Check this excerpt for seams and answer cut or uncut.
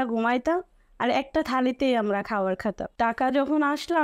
cut